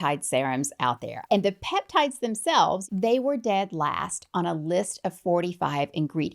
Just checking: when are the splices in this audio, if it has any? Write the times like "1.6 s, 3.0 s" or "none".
1.1 s, 2.8 s